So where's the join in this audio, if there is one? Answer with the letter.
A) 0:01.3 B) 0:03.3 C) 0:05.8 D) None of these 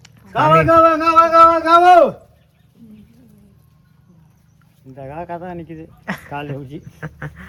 D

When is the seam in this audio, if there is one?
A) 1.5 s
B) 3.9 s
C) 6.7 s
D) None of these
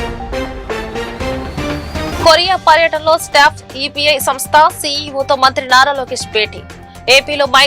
A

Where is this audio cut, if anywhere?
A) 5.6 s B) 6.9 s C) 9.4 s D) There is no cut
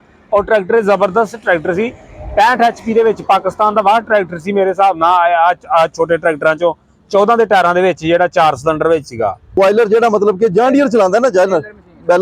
C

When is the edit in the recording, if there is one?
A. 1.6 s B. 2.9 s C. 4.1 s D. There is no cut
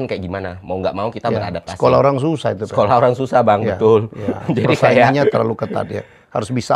D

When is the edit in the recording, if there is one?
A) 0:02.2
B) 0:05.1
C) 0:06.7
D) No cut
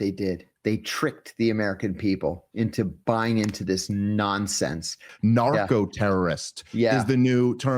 B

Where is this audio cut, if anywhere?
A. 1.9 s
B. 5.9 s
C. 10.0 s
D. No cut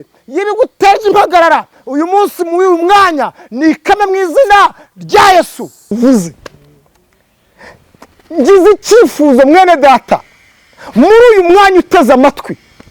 B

